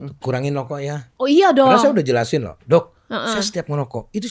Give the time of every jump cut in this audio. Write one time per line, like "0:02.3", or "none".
0:01.1